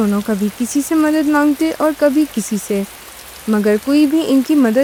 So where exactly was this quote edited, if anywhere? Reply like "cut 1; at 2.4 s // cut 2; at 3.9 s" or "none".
none

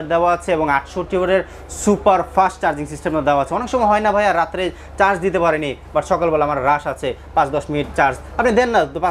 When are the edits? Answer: none

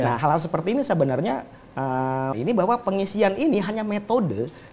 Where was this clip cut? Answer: cut 1; at 2.3 s

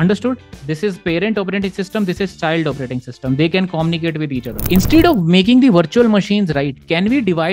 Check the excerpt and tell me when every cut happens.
cut 1; at 4.6 s

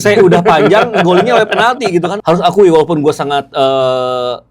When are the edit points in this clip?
cut 1; at 2.1 s

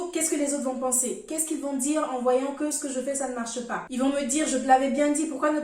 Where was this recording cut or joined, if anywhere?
cut 1; at 3.8 s

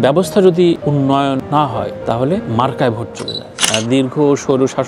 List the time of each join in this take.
cut 1; at 3.6 s

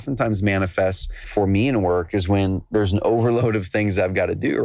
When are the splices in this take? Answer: cut 1; at 1.2 s

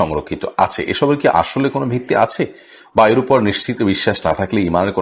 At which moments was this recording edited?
none

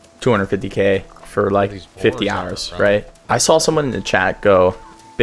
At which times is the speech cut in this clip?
cut 1; at 3.2 s

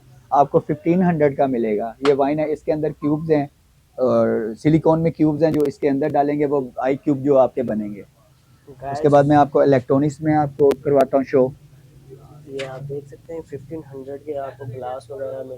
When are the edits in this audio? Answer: none

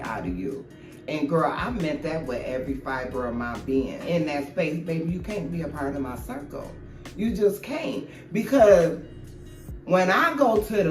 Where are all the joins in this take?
cut 1; at 4.0 s

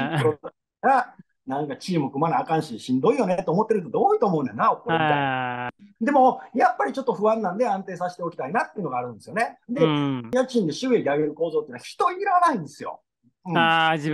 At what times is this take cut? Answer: cut 1; at 5.8 s // cut 2; at 10.3 s

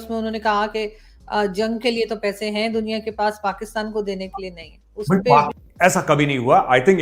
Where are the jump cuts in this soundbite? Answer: cut 1; at 5.5 s

